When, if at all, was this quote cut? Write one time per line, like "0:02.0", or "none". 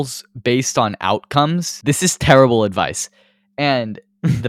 0:01.7

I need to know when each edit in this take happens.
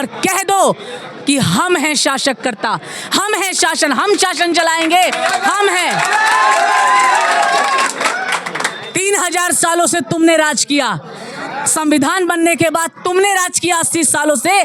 none

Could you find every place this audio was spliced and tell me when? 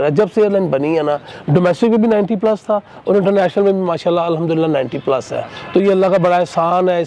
none

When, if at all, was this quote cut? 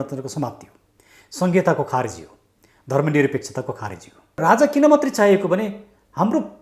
0:04.4

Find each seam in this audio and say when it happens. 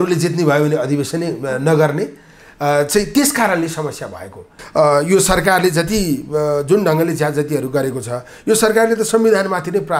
0:04.6

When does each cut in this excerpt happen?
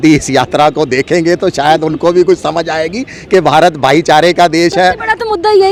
none

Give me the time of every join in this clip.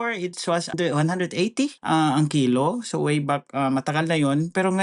0:00.7
0:01.8

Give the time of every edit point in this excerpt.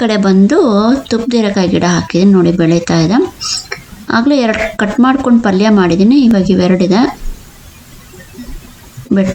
none

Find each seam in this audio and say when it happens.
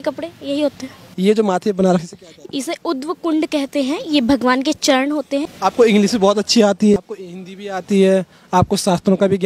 0:01.0
0:05.5
0:07.0

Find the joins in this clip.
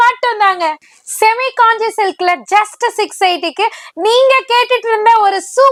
none

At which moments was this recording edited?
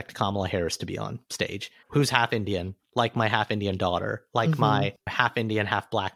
0:01.3
0:05.0

